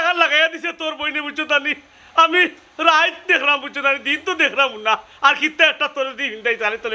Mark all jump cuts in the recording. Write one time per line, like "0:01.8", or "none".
none